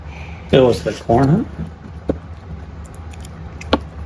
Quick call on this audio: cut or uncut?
uncut